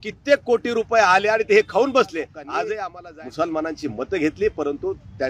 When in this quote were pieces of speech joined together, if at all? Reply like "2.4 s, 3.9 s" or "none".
2.9 s